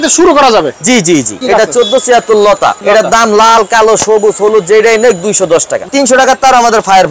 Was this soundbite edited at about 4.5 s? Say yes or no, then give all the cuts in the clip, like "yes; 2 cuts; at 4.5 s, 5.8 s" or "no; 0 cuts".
no; 3 cuts; at 1.4 s, 2.8 s, 5.9 s